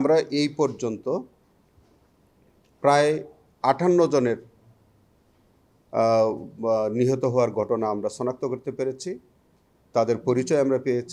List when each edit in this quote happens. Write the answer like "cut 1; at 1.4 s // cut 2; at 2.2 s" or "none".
none